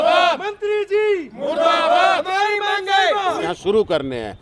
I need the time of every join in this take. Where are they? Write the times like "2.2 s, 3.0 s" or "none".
3.5 s